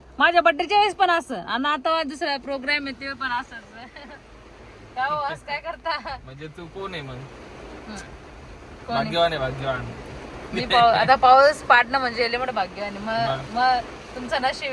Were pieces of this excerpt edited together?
no; 0 cuts

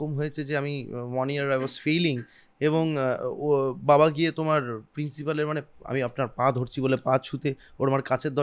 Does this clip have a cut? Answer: no; 0 cuts

